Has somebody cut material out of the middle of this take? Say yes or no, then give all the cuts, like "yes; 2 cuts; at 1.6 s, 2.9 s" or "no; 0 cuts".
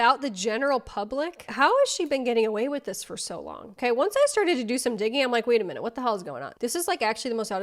no; 0 cuts